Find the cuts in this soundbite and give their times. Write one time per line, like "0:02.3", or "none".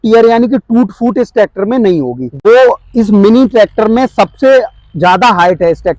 0:02.2